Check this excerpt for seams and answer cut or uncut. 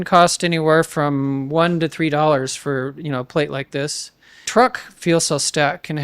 cut